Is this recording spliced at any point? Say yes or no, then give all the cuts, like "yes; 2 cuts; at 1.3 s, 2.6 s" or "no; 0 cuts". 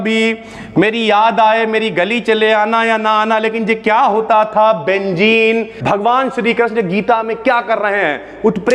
yes; 1 cut; at 5.7 s